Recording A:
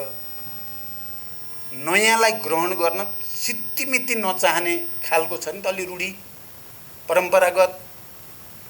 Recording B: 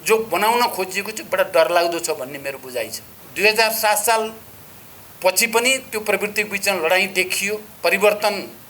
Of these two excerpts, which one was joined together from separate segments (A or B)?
B